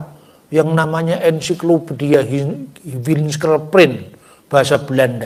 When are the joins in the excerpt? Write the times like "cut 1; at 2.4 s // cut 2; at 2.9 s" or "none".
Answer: none